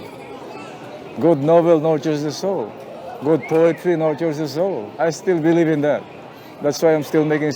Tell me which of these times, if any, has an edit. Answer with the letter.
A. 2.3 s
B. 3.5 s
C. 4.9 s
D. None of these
C